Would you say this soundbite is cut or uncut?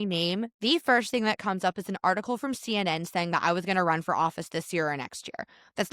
uncut